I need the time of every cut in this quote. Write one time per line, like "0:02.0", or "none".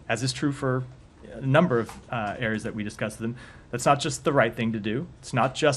0:02.4

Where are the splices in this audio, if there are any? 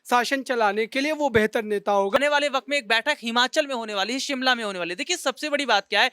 0:02.2

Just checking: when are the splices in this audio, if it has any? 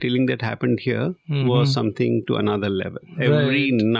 none

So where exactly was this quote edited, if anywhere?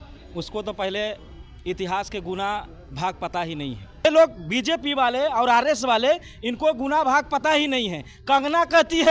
0:04.0

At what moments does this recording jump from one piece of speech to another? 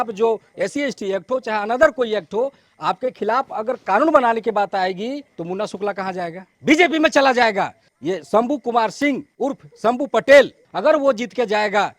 0:05.3
0:06.5
0:07.8
0:09.3
0:10.6

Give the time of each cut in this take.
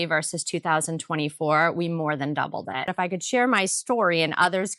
0:02.8

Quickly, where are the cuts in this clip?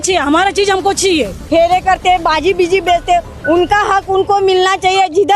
0:01.4

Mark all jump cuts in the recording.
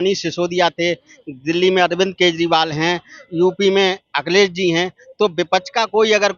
none

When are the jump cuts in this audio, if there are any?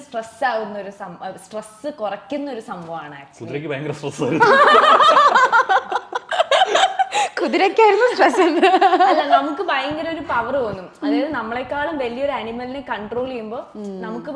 none

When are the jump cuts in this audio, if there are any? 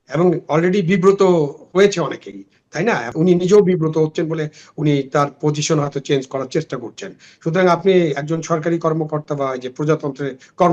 0:03.1

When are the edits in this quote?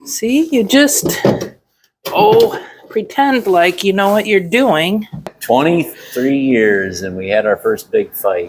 0:05.2

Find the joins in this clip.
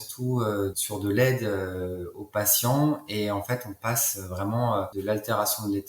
0:00.8
0:04.9

